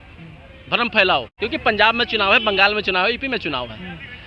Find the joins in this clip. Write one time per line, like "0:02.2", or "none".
0:01.3